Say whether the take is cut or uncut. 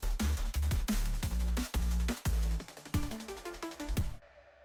uncut